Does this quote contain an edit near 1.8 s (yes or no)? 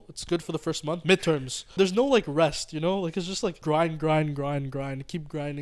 yes